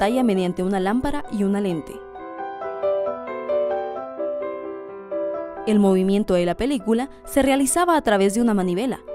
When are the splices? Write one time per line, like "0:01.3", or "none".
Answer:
0:04.9